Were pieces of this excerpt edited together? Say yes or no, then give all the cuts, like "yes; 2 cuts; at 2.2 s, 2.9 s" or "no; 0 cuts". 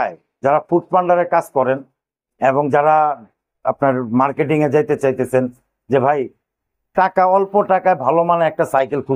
no; 0 cuts